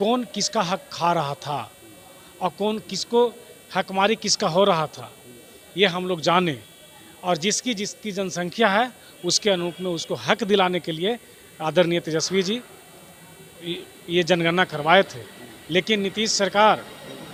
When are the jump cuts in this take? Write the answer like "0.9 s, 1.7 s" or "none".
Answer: none